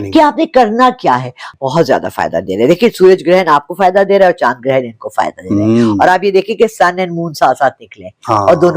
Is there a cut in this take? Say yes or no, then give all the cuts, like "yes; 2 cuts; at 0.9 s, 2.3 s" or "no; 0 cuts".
yes; 1 cut; at 1.5 s